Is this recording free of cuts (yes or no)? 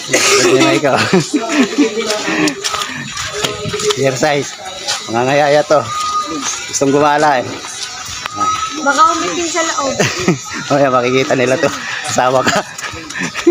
yes